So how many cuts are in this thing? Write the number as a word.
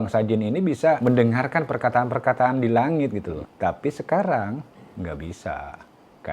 two